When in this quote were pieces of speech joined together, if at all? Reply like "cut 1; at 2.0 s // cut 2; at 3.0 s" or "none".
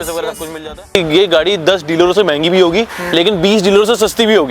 cut 1; at 0.9 s